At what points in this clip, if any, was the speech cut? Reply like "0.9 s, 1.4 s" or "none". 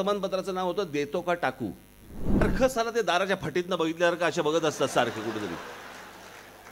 2.4 s